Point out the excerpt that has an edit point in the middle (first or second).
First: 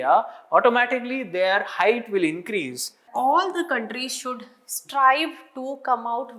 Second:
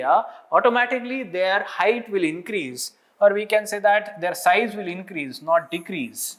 first